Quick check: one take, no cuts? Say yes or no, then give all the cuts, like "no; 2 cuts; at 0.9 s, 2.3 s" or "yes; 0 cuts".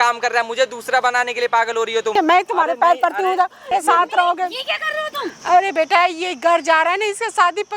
no; 3 cuts; at 2.1 s, 3.7 s, 5.3 s